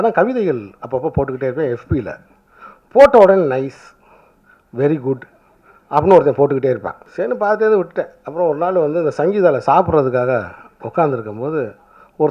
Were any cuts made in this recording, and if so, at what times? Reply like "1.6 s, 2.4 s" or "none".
7.0 s

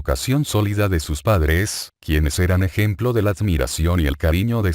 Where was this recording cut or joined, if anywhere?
2.3 s

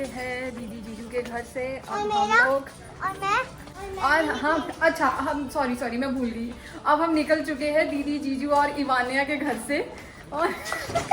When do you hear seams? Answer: 3.6 s

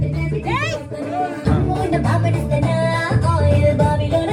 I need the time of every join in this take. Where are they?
1.4 s

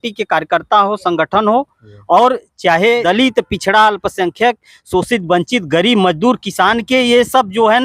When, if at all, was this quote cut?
3.0 s

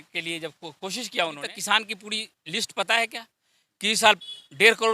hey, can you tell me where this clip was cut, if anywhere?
1.5 s

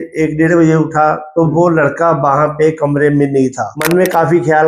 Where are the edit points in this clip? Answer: 3.7 s

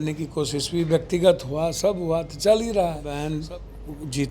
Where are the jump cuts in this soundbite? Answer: 3.3 s

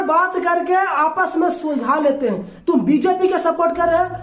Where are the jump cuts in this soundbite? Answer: 2.5 s

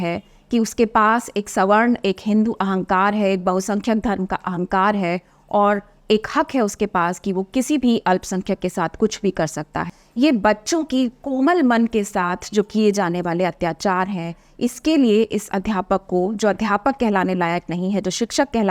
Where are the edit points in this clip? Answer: 9.9 s

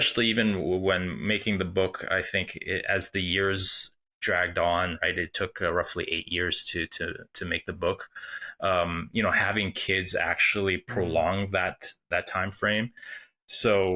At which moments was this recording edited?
none

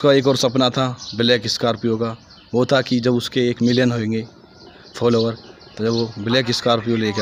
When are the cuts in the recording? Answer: none

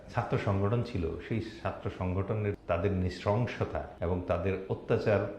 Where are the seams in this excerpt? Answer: 2.6 s, 3.9 s

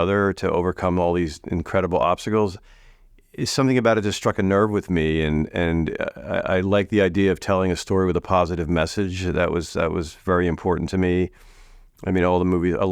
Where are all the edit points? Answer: none

